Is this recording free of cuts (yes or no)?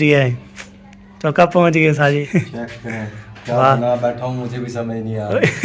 no